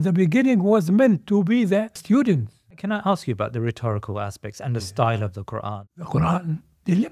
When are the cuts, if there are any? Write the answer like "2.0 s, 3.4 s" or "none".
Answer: 2.0 s, 2.8 s, 5.8 s